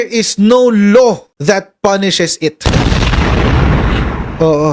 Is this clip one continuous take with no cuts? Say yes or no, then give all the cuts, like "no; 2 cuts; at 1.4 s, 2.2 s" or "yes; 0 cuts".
no; 1 cut; at 1.3 s